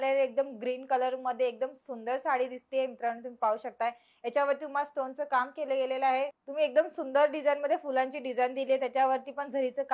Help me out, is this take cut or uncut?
cut